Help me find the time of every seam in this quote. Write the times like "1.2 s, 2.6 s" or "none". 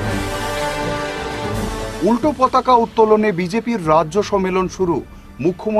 1.5 s